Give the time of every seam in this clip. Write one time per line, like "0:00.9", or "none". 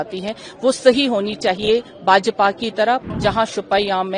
0:03.0